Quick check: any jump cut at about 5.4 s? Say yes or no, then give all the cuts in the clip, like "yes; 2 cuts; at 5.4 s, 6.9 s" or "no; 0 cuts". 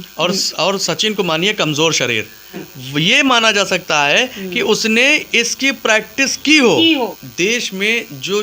no; 2 cuts; at 2.7 s, 7.2 s